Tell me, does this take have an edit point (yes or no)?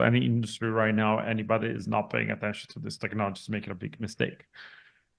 no